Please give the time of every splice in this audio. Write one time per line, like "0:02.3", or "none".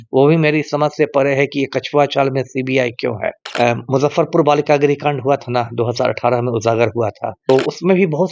0:03.4
0:07.4